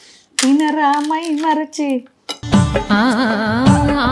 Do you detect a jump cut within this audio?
no; 0 cuts

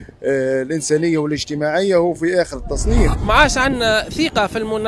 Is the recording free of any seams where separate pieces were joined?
no; 1 cut; at 3.2 s

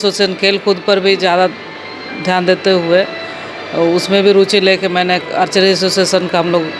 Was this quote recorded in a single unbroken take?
yes; 0 cuts

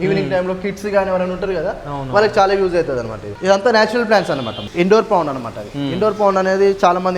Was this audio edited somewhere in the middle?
yes; 2 cuts; at 3.2 s, 4.6 s

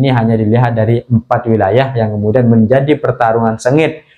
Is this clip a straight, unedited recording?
yes; 0 cuts

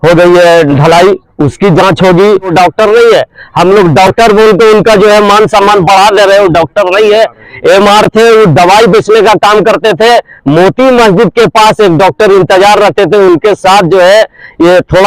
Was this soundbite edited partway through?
yes; 1 cut; at 2.5 s

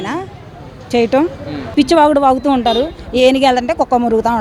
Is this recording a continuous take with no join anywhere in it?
no; 1 cut; at 1.6 s

